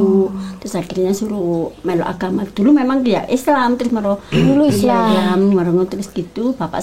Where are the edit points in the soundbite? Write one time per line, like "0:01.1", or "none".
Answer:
none

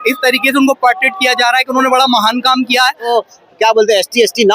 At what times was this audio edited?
0:03.1

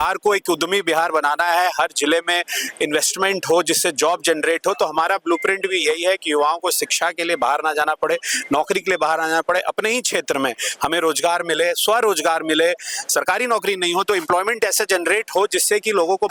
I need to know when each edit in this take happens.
none

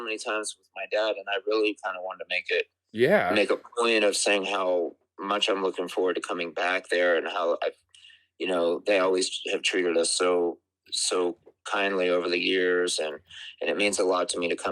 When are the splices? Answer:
none

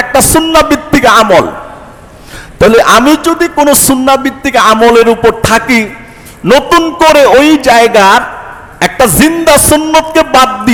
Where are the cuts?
none

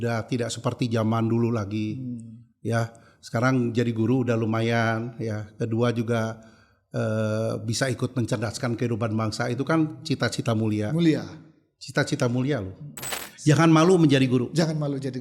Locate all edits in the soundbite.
0:13.2

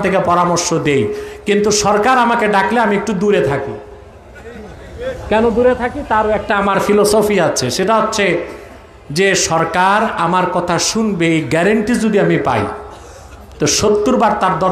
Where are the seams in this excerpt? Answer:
none

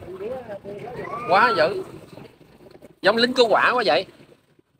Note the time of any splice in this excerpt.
none

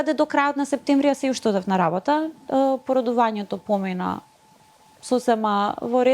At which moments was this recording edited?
none

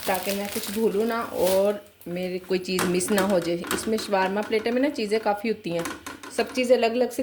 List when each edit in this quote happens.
none

